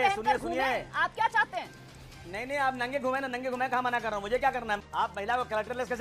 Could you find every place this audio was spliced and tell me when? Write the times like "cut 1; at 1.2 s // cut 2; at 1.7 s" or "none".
cut 1; at 4.8 s